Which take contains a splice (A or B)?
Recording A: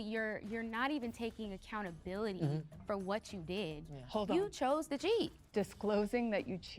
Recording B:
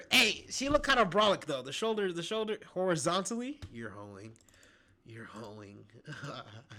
A